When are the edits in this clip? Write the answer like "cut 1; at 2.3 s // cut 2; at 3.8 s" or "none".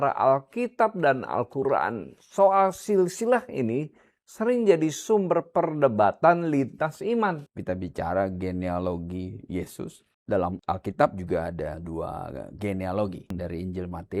cut 1; at 7.5 s // cut 2; at 10.1 s // cut 3; at 11.8 s // cut 4; at 13.3 s